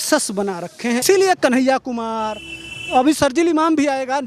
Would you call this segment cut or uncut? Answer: cut